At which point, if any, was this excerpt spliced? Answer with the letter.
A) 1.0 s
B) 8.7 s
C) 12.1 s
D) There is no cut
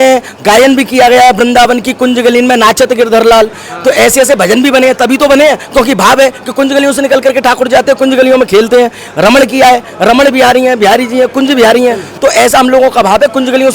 C